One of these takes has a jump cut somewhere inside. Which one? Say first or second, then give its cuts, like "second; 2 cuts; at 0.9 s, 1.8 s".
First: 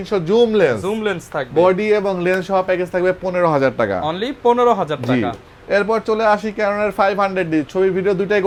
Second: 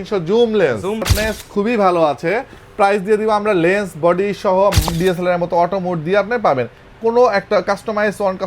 second; 2 cuts; at 1.1 s, 4.9 s